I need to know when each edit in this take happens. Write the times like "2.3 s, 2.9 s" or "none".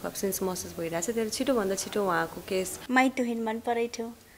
2.8 s